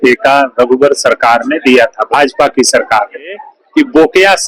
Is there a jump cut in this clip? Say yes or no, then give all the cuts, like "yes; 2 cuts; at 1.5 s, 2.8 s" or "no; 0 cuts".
yes; 1 cut; at 3.5 s